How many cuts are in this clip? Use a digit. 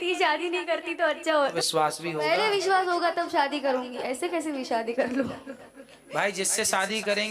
1